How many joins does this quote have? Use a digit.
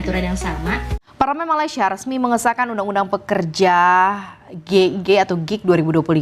1